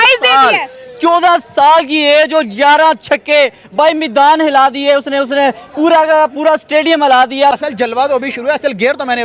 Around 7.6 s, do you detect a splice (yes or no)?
yes